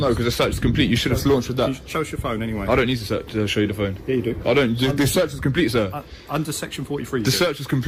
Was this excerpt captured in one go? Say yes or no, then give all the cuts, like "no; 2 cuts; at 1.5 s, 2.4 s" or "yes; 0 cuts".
yes; 0 cuts